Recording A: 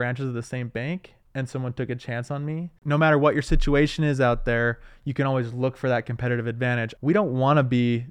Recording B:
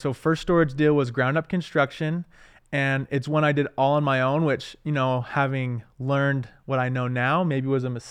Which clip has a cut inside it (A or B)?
A